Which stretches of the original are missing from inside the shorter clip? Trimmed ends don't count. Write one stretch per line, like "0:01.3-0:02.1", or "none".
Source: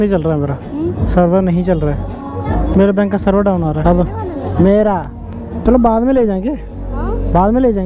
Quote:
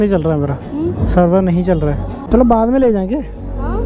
0:02.1-0:05.4